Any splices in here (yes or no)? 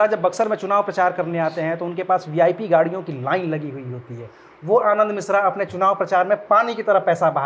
no